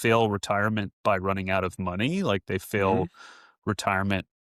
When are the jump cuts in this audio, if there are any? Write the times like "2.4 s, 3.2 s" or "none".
none